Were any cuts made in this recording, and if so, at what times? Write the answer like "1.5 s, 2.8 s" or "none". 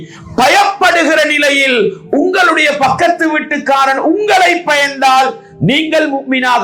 none